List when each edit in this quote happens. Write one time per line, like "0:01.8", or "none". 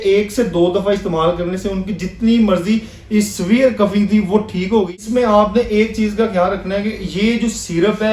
0:04.9